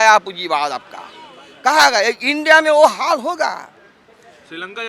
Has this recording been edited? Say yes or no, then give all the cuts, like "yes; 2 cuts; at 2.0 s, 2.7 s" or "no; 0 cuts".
no; 0 cuts